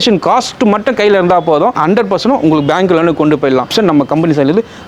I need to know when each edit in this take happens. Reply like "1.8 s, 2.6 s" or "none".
1.8 s, 3.7 s